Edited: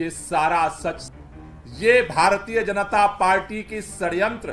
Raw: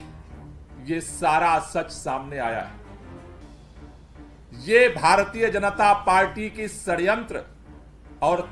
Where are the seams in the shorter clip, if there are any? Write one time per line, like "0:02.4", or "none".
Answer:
0:01.0